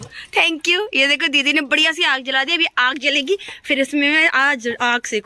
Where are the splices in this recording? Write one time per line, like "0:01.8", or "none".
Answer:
none